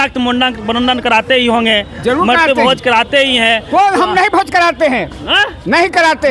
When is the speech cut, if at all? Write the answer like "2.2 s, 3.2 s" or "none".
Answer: none